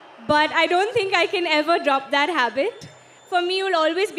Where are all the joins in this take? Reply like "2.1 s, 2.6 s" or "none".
none

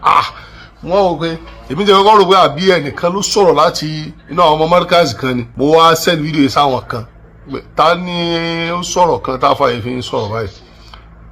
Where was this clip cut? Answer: 5.5 s

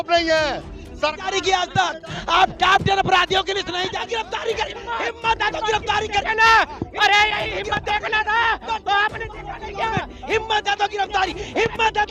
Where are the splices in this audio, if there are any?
3.9 s

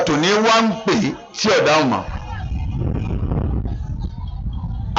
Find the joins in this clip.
none

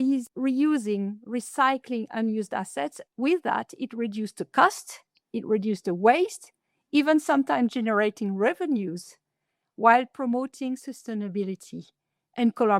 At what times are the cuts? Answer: 3.0 s

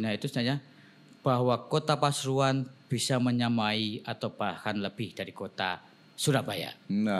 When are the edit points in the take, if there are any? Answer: none

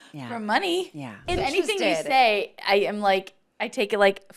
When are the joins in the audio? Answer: 1.3 s

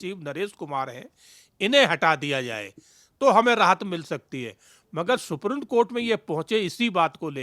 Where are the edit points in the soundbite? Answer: none

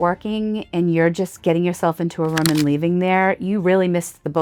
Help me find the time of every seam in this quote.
none

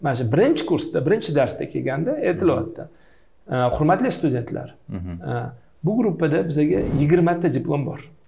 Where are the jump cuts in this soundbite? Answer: none

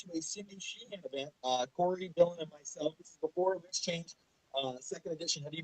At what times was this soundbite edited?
3.0 s

